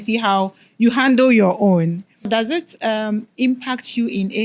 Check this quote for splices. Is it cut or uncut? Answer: cut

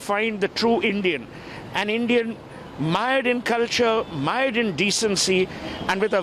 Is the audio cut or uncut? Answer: uncut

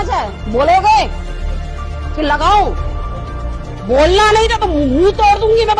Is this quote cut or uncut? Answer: uncut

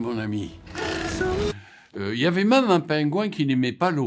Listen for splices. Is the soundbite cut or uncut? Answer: cut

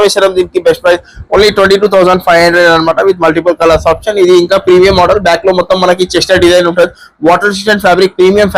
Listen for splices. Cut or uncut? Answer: uncut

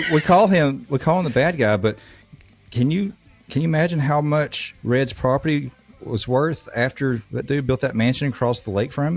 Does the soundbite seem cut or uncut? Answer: uncut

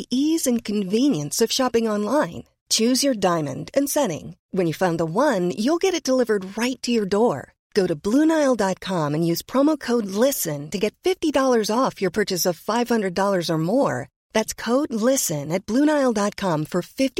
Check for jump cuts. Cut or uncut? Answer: uncut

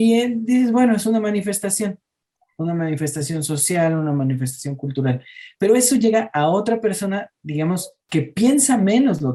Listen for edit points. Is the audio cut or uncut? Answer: uncut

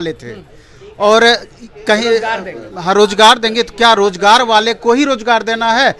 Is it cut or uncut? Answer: uncut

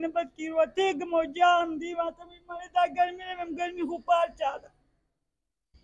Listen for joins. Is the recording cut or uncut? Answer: uncut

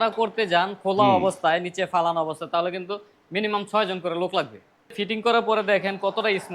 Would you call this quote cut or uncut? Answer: cut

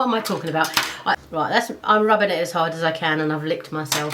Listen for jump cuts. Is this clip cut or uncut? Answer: cut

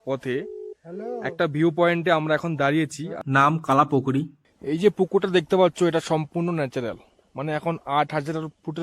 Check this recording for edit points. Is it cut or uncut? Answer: cut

